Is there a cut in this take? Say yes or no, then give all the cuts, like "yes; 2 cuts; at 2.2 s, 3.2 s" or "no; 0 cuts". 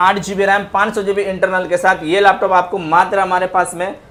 no; 0 cuts